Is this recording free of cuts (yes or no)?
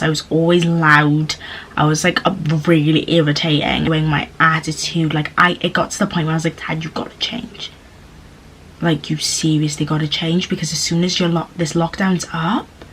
no